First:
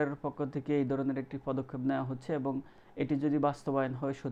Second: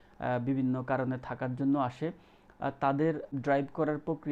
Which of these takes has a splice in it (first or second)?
second